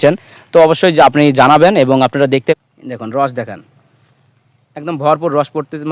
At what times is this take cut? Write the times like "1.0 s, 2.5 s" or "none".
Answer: 2.6 s